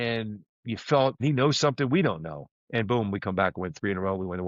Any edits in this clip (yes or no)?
yes